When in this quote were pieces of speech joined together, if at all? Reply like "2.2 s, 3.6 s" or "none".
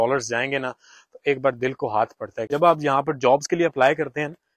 2.3 s